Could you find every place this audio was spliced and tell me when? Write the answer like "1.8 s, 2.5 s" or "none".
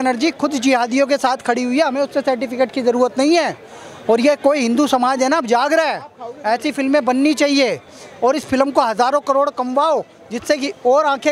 none